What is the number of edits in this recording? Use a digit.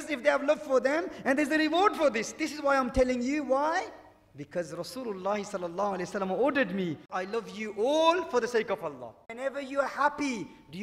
2